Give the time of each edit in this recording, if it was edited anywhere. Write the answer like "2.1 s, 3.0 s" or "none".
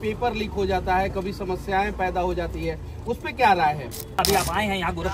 4.2 s